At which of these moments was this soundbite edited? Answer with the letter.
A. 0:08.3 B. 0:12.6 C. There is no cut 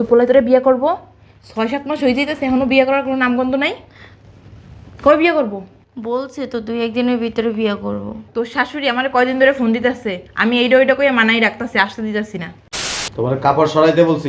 B